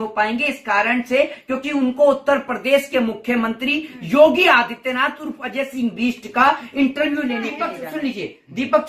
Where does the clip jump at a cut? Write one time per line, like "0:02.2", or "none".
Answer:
0:07.7